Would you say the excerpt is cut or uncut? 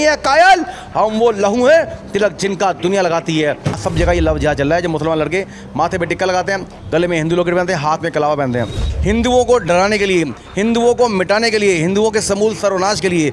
cut